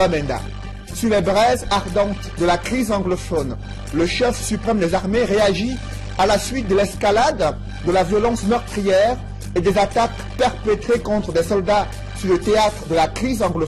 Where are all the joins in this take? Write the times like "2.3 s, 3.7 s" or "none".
1.5 s